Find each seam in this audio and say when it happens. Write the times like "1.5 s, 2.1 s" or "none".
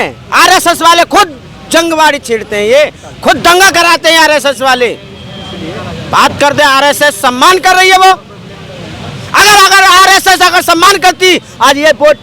none